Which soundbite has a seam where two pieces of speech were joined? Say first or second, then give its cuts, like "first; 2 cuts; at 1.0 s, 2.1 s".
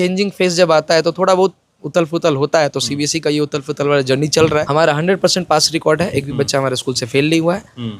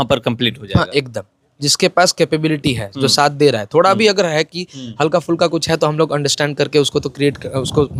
first; 1 cut; at 4.7 s